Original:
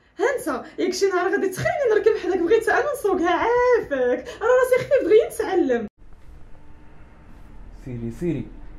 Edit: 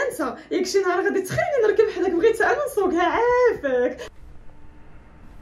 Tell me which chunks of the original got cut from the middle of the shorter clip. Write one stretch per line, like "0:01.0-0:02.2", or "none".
0:04.3-0:06.1